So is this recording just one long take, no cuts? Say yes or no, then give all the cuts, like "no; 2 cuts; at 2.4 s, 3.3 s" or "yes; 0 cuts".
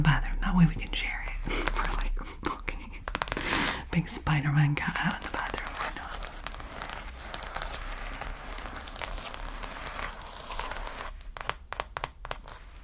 yes; 0 cuts